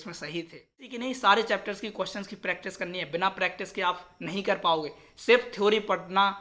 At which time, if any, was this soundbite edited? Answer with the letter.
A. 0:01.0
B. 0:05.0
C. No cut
A